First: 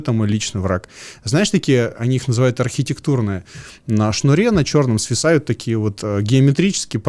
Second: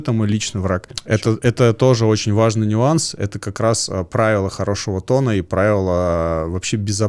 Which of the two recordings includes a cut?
second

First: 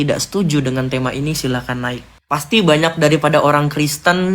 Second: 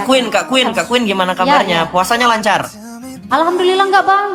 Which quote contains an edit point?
first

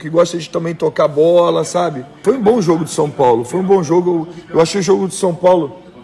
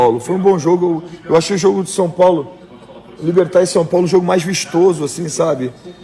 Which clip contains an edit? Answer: first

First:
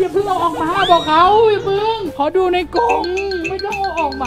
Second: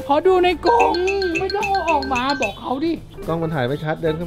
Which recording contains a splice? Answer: second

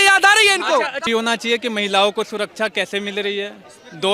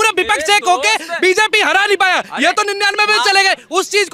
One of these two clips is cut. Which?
first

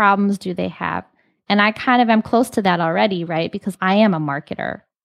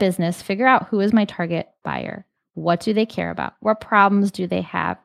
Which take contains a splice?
first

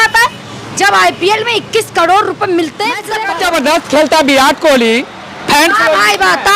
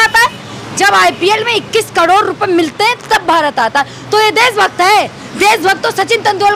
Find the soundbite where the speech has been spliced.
first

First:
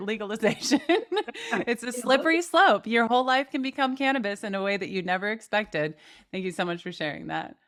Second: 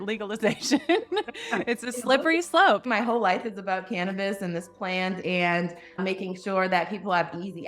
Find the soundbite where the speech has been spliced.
second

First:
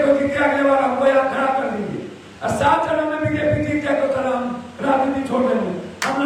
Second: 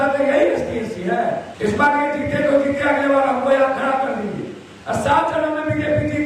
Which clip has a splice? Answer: second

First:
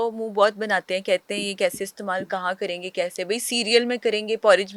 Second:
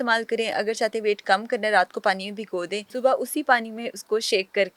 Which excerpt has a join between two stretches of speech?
second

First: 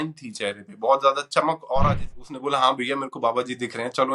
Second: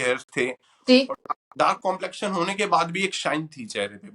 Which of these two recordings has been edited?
first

